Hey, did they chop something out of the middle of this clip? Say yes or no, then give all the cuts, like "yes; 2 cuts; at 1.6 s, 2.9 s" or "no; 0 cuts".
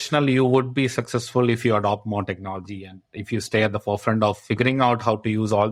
no; 0 cuts